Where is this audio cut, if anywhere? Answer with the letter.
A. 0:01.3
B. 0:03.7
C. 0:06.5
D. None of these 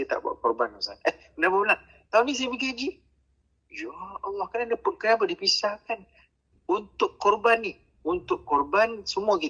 C